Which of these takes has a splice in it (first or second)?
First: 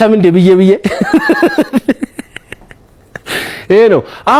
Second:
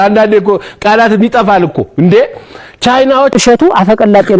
second